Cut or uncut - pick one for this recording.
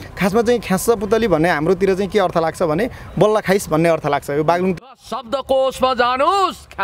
cut